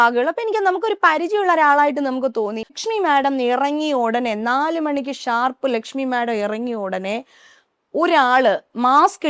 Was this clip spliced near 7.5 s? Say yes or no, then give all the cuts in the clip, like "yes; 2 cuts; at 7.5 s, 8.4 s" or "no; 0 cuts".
no; 1 cut; at 2.7 s